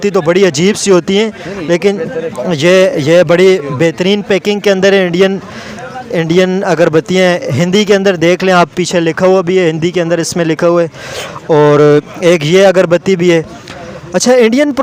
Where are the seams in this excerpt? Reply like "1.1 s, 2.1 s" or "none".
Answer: none